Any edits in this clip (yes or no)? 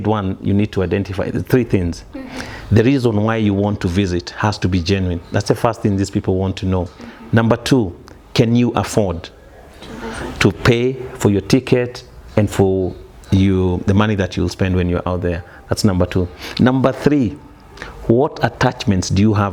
no